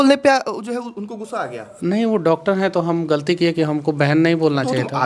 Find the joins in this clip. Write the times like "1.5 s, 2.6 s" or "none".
none